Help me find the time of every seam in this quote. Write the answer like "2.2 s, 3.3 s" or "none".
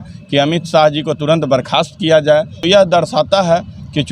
2.6 s